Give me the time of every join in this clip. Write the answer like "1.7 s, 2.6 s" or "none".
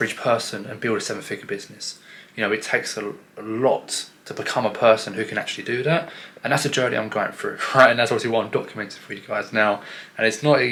none